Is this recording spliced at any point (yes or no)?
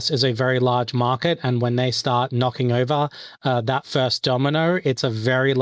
no